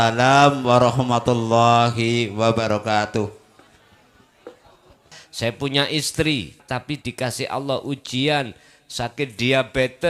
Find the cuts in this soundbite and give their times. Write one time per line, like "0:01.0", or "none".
0:05.2
0:06.6